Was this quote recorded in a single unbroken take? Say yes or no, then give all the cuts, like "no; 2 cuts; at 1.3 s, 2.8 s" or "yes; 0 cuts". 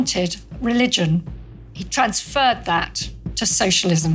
no; 1 cut; at 1.4 s